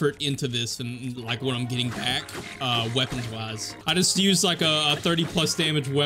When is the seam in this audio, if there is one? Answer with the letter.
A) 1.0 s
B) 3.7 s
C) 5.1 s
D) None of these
B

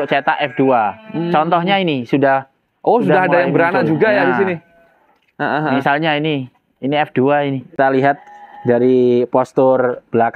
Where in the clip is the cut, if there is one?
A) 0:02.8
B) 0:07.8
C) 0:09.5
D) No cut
B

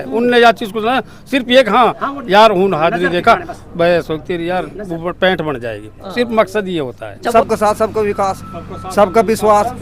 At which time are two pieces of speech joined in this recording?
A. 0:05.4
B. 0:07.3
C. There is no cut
B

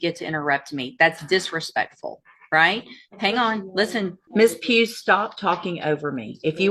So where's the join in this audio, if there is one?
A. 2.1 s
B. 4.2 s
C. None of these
B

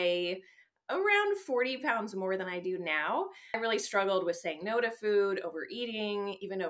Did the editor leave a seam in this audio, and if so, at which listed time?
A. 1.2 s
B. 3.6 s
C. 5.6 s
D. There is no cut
B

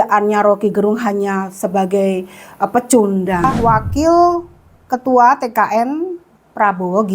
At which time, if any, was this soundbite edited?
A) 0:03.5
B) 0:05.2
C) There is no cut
A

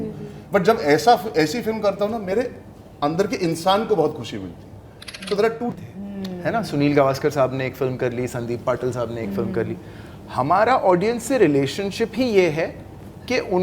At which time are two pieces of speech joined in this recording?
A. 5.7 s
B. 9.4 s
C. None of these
A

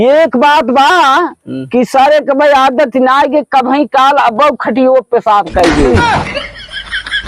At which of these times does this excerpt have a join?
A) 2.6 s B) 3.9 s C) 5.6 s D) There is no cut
C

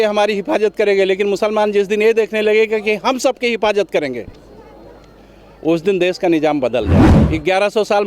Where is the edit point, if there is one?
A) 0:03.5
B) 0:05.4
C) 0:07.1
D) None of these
C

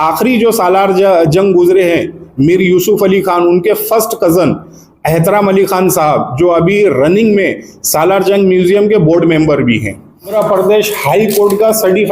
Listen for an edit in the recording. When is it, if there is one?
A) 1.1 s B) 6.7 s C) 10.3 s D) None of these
C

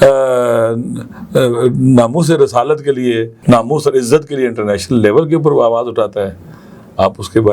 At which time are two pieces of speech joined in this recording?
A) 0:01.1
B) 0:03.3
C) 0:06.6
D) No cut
B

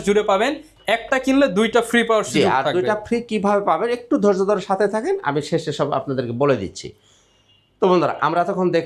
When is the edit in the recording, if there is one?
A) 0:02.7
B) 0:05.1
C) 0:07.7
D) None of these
D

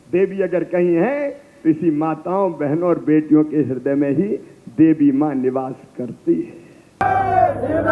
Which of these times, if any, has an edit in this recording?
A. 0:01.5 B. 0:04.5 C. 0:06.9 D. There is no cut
C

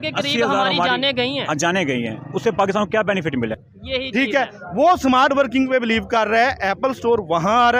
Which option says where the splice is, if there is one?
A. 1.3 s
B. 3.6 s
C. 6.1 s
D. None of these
B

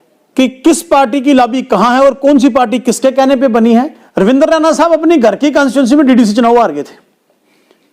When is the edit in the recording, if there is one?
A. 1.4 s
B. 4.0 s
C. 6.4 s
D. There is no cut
B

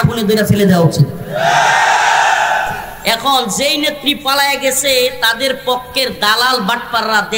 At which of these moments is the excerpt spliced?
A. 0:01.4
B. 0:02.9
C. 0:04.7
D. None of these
B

